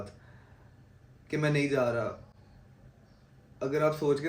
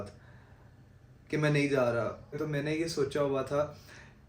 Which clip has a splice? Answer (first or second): second